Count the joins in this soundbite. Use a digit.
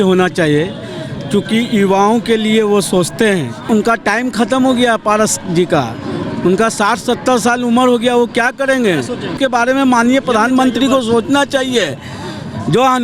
2